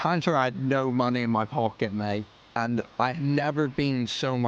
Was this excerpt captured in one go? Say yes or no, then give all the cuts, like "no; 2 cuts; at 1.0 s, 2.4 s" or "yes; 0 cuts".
no; 1 cut; at 2.6 s